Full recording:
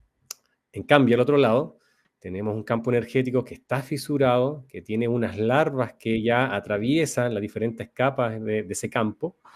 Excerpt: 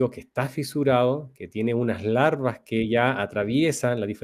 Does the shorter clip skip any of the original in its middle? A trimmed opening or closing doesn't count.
no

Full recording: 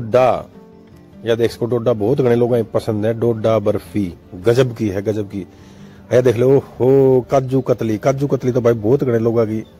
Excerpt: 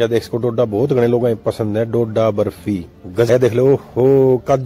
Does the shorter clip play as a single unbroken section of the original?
no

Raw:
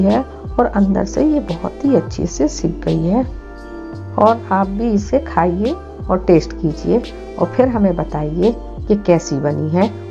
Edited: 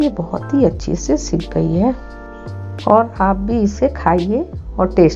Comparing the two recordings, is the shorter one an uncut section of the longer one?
yes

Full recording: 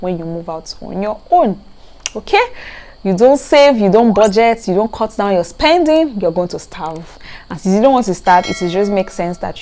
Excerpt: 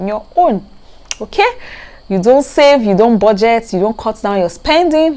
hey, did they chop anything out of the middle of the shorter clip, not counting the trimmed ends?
no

